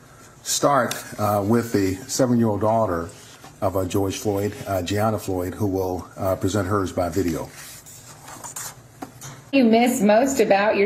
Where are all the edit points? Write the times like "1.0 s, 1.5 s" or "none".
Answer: 9.5 s